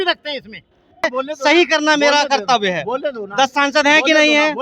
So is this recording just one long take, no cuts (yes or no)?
no